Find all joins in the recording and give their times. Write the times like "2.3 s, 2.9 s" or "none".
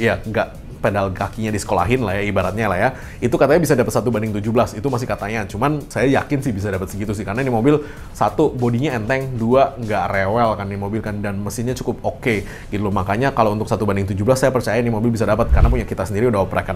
none